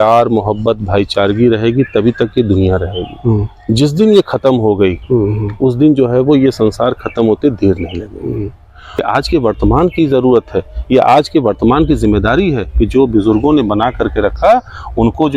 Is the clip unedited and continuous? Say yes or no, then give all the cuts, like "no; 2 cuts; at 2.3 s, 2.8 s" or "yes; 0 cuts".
no; 1 cut; at 9.0 s